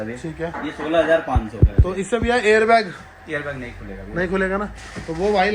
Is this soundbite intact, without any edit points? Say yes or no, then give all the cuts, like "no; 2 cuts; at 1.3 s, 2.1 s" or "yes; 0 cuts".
yes; 0 cuts